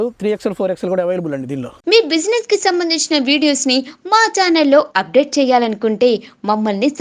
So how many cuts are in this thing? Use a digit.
1